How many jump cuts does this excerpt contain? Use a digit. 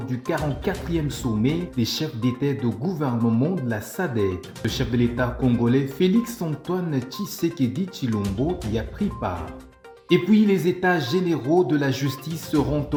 0